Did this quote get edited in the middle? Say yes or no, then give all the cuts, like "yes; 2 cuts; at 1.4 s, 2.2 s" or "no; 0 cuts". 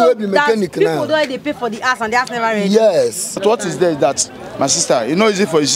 yes; 1 cut; at 3.4 s